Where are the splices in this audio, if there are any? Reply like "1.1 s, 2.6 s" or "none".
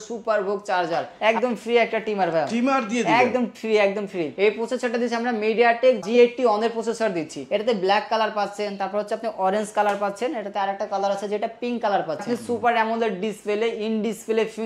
1.1 s, 4.3 s, 7.4 s, 12.2 s